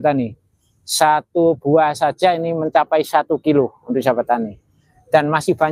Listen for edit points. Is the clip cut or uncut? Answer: uncut